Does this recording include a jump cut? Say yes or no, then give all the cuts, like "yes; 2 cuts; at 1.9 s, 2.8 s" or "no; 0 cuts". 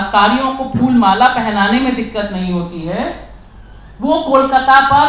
no; 0 cuts